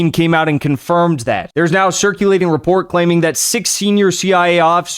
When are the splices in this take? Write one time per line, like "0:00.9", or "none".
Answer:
0:01.5

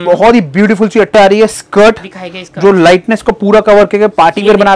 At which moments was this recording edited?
0:01.2

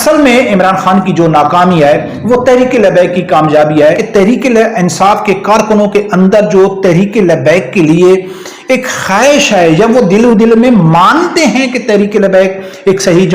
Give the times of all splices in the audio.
0:04.0

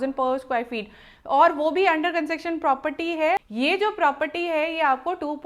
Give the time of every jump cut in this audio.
0:03.4

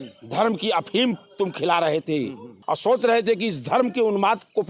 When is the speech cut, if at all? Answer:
0:02.5

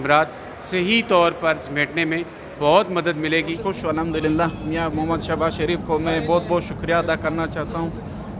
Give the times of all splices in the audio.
0:03.6

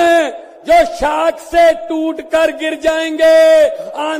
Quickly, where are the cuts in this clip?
none

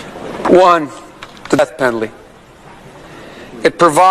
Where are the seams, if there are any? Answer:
0:01.6

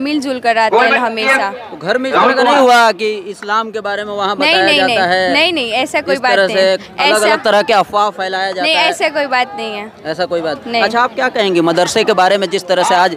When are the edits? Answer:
none

